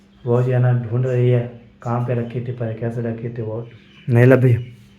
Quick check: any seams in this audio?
yes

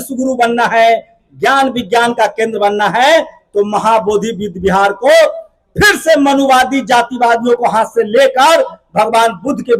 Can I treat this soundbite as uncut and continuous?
yes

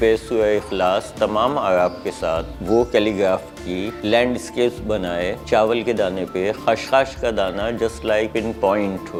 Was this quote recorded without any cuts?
yes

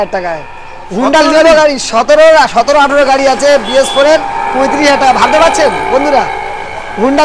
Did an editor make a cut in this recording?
no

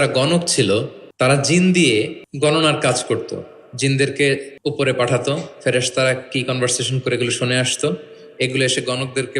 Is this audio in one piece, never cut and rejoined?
no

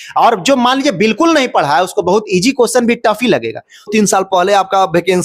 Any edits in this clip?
yes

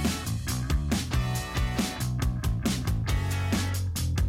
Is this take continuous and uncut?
no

